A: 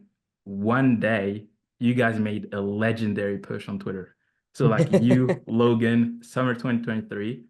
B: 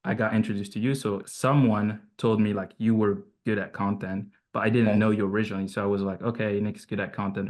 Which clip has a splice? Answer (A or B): B